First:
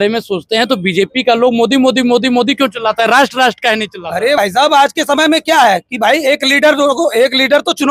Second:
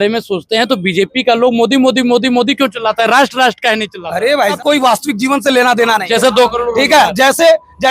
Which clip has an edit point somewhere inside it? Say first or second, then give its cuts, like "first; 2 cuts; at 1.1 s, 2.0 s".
second; 1 cut; at 4.4 s